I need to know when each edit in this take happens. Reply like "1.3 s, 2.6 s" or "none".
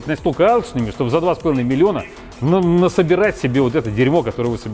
none